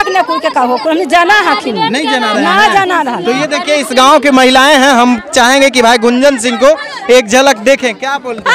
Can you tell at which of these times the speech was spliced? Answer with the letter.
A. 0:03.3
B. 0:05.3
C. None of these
C